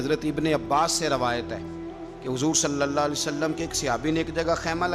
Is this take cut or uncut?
uncut